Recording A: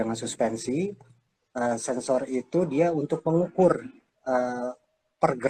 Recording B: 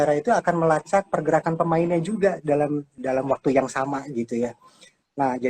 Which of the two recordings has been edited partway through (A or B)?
B